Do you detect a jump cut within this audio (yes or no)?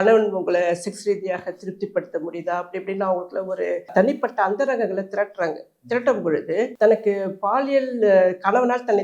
yes